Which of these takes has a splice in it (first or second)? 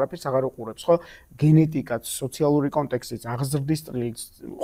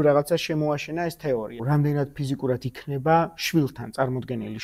second